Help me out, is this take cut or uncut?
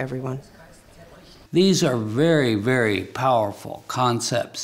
cut